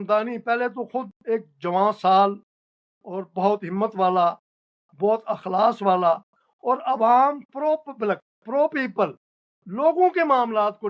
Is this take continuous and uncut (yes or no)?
yes